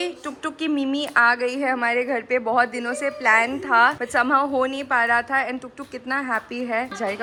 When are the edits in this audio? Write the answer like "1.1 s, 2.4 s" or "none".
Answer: none

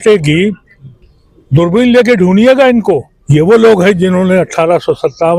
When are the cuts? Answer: 3.1 s

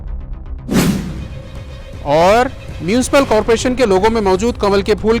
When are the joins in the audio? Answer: 0.8 s, 1.0 s

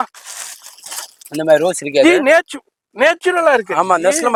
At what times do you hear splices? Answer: none

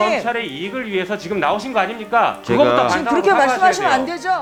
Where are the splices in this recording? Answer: none

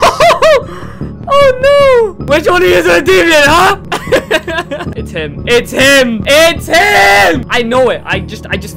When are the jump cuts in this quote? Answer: 2.2 s, 3.8 s, 5.0 s, 6.2 s, 7.5 s

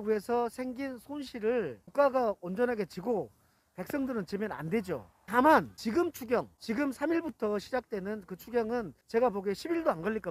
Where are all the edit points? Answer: none

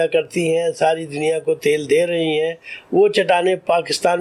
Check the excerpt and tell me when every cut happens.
none

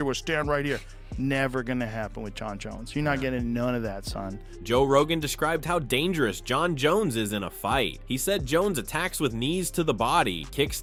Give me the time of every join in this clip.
none

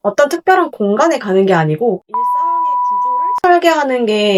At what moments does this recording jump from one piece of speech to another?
none

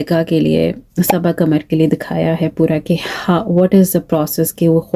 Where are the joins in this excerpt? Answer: none

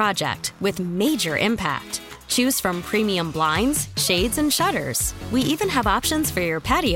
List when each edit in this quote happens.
none

